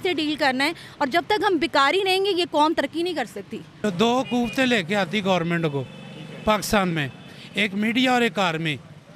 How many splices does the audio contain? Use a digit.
1